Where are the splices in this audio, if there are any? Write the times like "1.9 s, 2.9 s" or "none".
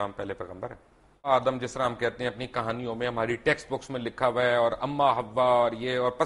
1.3 s